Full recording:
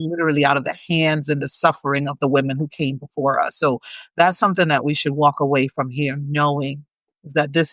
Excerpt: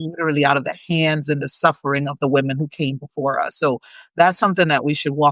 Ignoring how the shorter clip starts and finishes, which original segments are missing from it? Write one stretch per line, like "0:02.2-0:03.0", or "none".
none